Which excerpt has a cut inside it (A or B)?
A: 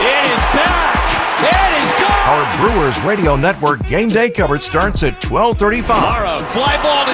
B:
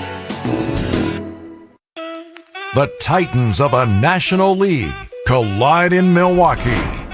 B